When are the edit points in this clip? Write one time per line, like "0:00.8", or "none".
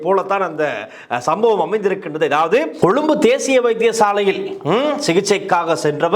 0:02.8